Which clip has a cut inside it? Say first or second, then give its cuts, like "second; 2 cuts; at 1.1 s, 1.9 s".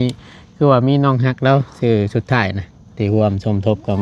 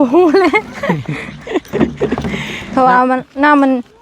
second; 1 cut; at 2.6 s